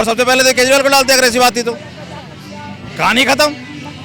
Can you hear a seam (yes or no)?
no